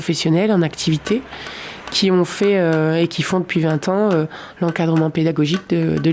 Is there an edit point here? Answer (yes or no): no